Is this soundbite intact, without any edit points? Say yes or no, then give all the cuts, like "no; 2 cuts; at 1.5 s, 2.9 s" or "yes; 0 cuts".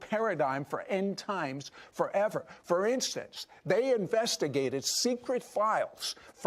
yes; 0 cuts